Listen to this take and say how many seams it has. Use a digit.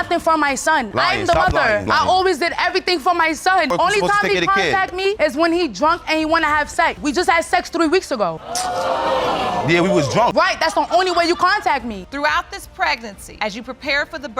3